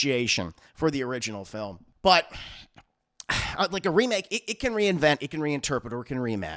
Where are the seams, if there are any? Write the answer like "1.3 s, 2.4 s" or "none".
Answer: 1.8 s